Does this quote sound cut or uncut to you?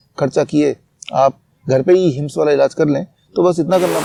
uncut